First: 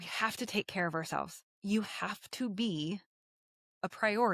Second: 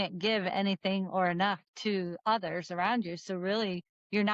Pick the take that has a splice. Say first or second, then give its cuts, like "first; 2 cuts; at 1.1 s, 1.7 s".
first; 1 cut; at 1.4 s